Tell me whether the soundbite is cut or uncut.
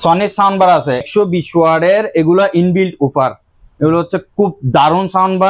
cut